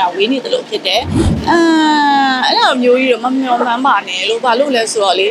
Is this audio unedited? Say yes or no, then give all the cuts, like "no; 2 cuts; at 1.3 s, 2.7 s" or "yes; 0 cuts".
no; 1 cut; at 1.3 s